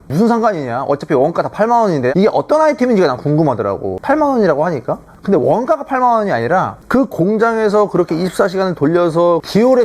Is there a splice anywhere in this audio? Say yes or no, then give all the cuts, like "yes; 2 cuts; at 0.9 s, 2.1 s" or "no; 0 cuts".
yes; 2 cuts; at 2.1 s, 6.8 s